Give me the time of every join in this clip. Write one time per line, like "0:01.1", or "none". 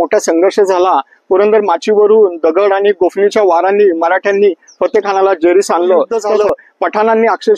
0:06.2